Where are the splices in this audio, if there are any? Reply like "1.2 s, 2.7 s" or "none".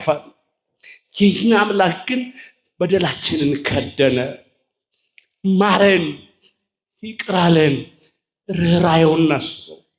none